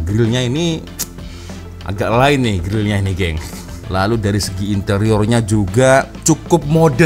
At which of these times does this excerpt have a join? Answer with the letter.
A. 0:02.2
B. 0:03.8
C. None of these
B